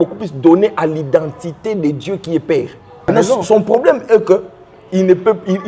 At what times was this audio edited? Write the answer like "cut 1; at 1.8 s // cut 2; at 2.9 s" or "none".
cut 1; at 3.1 s